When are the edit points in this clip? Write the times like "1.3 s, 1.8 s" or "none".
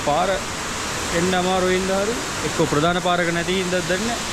none